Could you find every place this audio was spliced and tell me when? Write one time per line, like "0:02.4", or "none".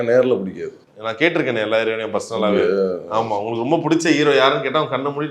none